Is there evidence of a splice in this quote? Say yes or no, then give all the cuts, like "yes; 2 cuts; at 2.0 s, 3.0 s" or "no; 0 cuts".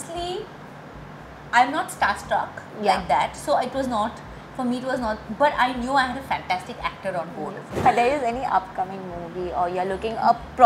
yes; 1 cut; at 7.8 s